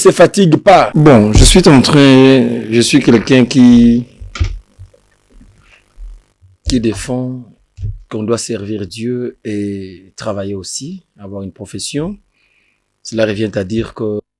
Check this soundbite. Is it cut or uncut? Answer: cut